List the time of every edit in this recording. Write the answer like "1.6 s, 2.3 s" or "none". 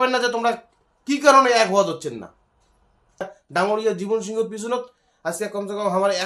3.3 s